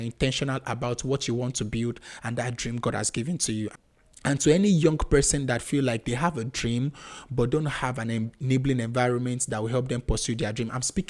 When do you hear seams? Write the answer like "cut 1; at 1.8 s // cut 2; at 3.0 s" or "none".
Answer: cut 1; at 3.7 s